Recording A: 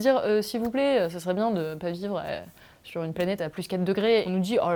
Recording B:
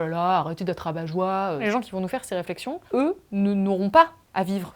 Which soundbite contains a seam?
B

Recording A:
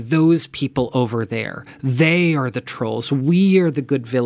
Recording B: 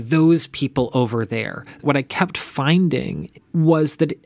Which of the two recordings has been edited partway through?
B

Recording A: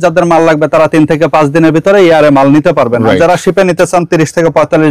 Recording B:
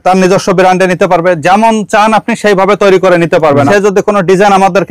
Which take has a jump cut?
B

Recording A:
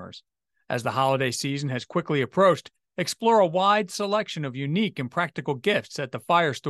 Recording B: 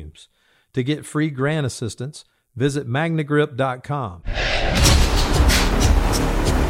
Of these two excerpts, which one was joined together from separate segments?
B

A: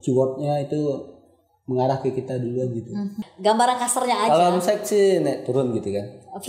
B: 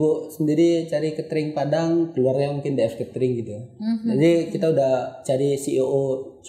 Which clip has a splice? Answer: A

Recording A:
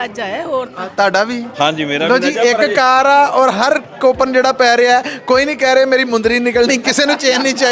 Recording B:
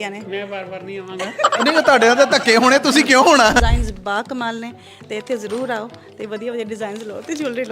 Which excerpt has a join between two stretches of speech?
B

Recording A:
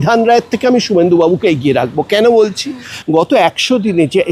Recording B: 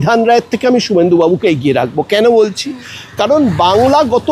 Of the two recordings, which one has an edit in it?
A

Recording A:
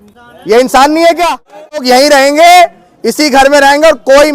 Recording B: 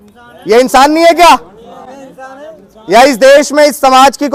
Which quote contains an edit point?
A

